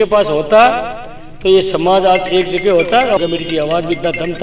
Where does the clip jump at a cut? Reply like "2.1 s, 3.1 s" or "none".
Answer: 3.2 s